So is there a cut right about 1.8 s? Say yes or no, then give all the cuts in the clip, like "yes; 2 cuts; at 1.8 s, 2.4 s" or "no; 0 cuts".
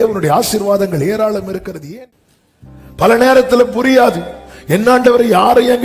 yes; 1 cut; at 1.8 s